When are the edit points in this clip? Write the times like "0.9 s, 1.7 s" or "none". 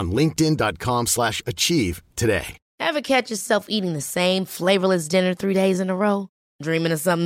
2.6 s